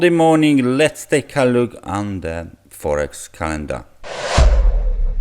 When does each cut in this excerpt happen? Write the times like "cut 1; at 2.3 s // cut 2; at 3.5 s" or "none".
cut 1; at 4.1 s